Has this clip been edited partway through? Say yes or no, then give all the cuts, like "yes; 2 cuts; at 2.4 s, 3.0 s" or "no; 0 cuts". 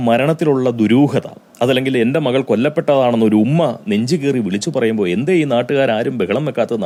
no; 0 cuts